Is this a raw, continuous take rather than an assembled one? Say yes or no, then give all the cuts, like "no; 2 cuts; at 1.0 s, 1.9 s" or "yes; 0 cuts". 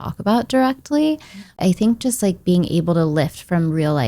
no; 1 cut; at 1.6 s